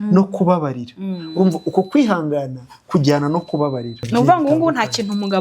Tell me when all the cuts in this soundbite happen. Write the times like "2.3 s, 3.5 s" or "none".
4.0 s